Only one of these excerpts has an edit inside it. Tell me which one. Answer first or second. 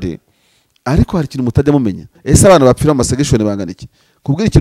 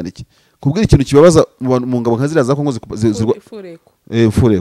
first